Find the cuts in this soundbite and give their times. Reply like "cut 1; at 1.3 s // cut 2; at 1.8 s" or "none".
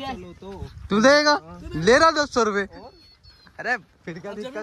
none